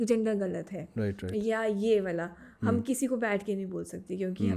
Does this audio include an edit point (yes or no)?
no